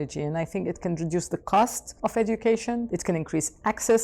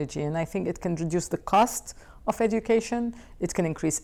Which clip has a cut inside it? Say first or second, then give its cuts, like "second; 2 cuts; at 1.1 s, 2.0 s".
first; 2 cuts; at 1.8 s, 2.9 s